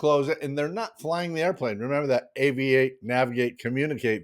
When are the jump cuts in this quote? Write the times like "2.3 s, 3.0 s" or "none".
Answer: none